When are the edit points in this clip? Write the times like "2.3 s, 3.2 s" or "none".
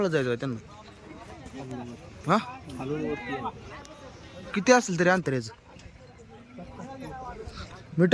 none

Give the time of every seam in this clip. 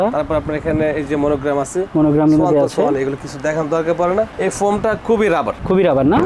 none

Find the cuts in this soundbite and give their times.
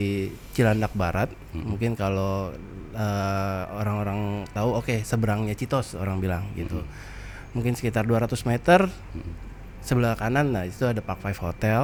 none

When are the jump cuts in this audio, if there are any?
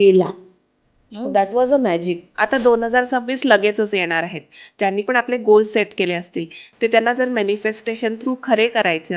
2.2 s, 4.7 s

